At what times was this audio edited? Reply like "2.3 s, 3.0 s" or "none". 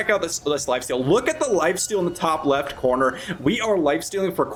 none